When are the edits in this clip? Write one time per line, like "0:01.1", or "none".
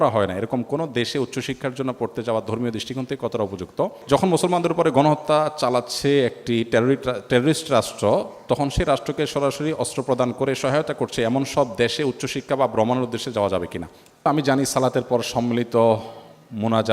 0:04.0
0:14.3